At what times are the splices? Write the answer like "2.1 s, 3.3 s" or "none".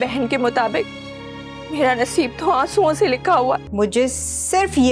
3.7 s